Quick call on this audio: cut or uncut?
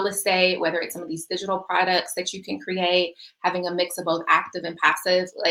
uncut